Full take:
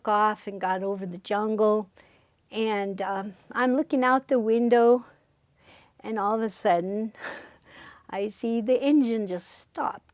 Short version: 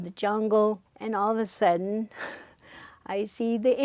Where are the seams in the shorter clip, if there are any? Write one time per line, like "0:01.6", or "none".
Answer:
0:00.9

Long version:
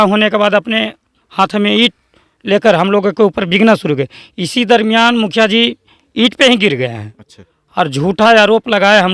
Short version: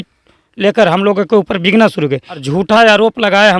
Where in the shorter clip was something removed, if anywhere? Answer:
0:02.4

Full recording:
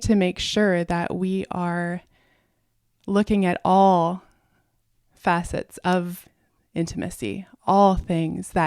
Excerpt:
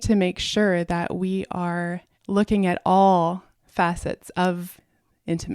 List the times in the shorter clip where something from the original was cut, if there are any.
0:02.1
0:03.5

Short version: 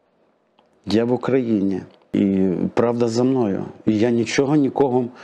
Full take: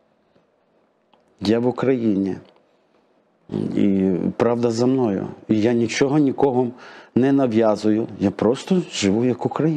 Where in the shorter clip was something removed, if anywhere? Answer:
0:02.1

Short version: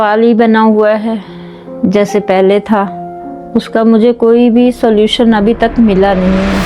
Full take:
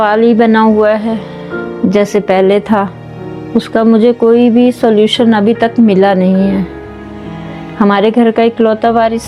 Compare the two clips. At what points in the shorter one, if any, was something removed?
none

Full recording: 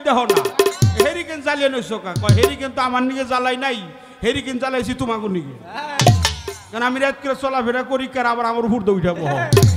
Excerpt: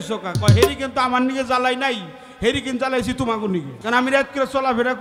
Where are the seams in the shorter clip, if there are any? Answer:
0:03.7

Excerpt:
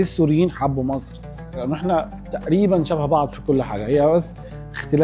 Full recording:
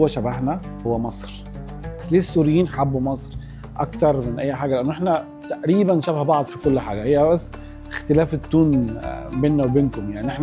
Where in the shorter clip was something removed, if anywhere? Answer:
0:01.6

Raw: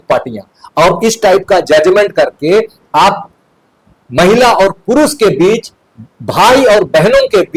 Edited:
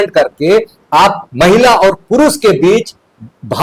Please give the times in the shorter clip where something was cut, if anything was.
0:01.2

